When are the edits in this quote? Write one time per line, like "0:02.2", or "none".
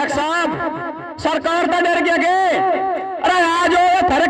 none